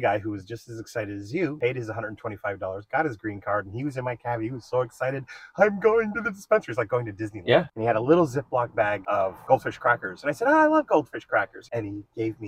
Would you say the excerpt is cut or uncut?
cut